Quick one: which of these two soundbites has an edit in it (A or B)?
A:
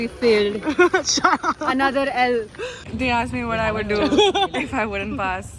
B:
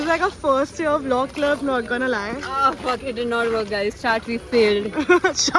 A